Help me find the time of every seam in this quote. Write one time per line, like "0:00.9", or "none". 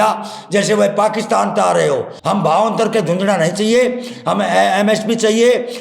0:02.1